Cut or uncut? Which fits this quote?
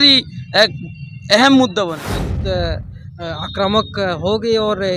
cut